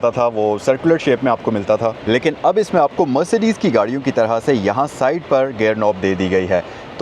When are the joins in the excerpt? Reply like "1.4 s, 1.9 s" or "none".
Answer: 2.0 s